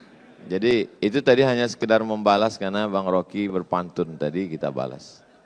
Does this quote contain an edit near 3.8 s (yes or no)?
no